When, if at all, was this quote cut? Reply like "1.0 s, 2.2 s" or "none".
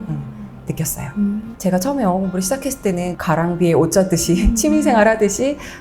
1.5 s, 3.1 s